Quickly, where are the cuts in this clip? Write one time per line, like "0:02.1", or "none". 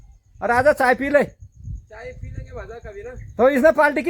none